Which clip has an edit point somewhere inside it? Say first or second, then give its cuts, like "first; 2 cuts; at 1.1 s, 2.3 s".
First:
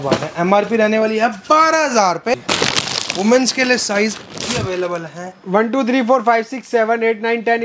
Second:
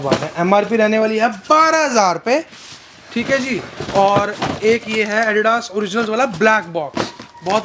first; 1 cut; at 2.3 s